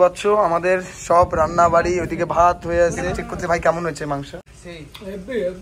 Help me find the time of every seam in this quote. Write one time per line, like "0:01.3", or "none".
0:03.2
0:04.4